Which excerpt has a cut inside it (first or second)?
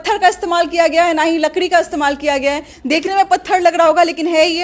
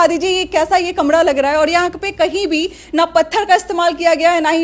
first